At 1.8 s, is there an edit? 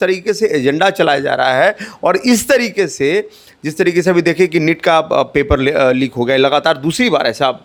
no; 0 cuts

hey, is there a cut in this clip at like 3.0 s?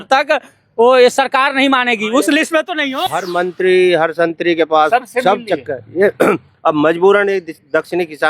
yes; 1 cut; at 3.0 s

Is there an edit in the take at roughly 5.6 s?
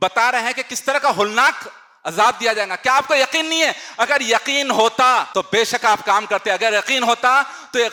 no; 0 cuts

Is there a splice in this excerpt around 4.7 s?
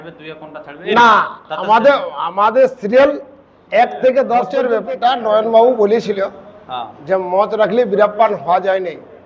yes; 1 cut; at 4.7 s

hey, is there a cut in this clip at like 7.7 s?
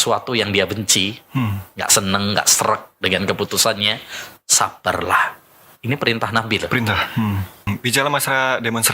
yes; 1 cut; at 7.7 s

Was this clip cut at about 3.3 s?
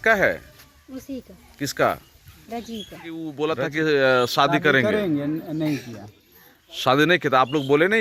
yes; 1 cut; at 3.3 s

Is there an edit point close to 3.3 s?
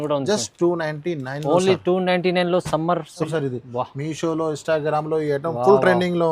yes; 1 cut; at 3.3 s

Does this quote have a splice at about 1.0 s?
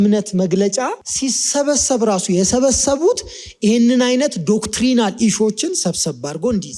yes; 1 cut; at 1.0 s

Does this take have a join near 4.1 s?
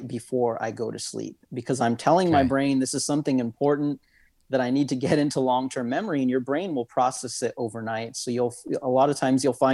no; 0 cuts

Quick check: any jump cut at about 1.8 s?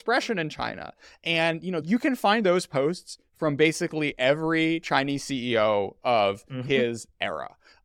yes; 1 cut; at 1.8 s

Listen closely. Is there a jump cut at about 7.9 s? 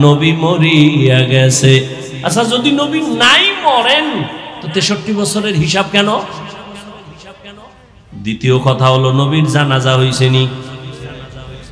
yes; 1 cut; at 7.9 s

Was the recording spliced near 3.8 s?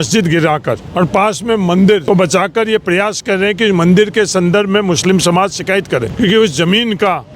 no; 3 cuts; at 0.8 s, 2.0 s, 6.1 s

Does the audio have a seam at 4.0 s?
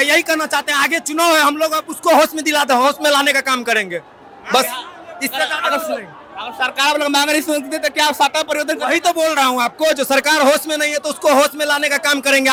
no; 0 cuts

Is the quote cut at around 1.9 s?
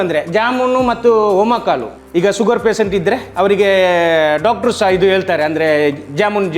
yes; 1 cut; at 1.9 s

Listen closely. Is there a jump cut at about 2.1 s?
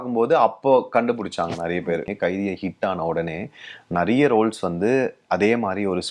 yes; 1 cut; at 2.1 s

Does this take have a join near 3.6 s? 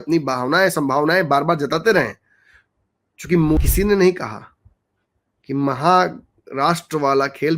yes; 1 cut; at 3.6 s

